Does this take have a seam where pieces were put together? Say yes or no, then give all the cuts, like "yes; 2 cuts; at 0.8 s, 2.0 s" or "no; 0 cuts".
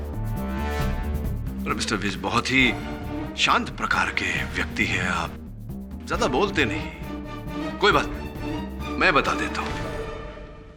no; 0 cuts